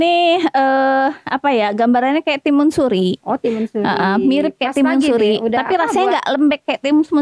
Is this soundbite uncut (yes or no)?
yes